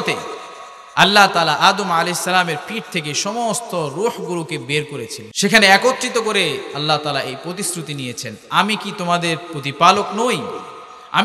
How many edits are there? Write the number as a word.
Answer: one